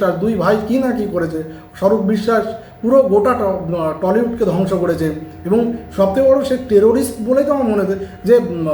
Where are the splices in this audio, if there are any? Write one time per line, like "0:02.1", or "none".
none